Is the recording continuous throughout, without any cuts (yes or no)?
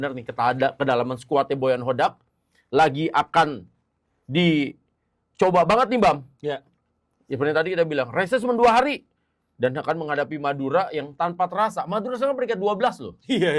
yes